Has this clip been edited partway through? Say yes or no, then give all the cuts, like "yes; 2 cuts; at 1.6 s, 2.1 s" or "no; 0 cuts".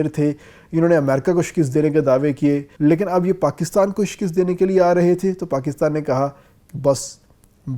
yes; 1 cut; at 2.7 s